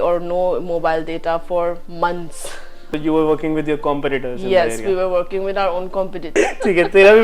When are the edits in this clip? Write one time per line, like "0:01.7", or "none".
0:02.9
0:06.3